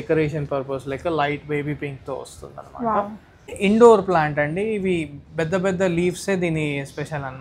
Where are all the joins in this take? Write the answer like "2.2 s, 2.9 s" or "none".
3.5 s